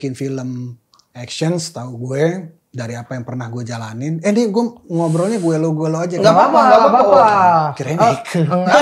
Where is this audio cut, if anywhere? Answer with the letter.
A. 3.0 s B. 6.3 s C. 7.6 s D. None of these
D